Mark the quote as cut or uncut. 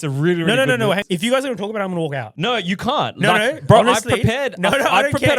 cut